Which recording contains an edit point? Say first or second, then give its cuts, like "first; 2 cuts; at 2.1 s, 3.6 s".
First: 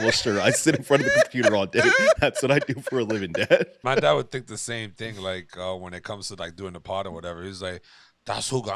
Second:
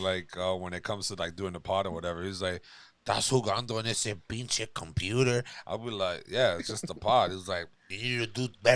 first; 1 cut; at 3.8 s